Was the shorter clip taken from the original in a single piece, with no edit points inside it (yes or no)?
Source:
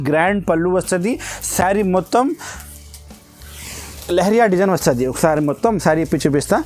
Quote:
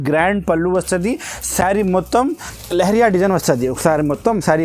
no